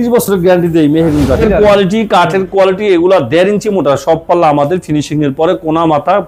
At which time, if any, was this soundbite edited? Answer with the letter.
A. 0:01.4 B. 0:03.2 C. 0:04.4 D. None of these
A